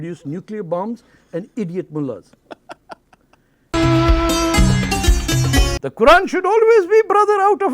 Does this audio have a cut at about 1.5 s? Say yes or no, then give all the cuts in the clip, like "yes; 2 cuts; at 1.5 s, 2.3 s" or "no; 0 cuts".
no; 2 cuts; at 3.7 s, 5.7 s